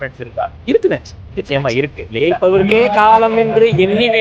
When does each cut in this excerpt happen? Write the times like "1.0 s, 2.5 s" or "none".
none